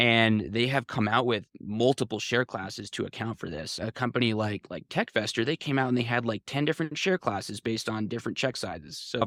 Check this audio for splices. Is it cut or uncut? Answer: uncut